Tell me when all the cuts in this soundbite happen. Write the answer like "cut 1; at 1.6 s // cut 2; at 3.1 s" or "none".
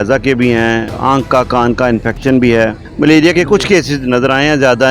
cut 1; at 0.9 s // cut 2; at 2.8 s